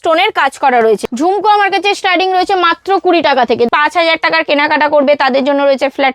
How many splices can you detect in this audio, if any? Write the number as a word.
two